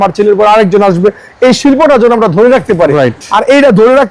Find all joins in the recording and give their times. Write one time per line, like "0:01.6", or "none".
none